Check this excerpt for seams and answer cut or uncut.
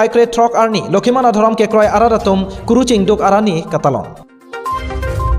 uncut